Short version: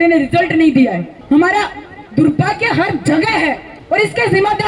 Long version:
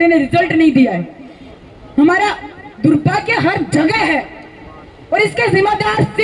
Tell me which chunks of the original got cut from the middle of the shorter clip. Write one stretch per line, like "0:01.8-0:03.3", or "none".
0:01.1-0:01.8
0:04.4-0:04.9